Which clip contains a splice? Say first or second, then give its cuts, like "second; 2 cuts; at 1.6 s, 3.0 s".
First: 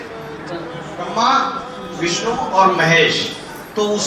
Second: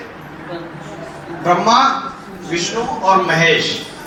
first; 1 cut; at 1.0 s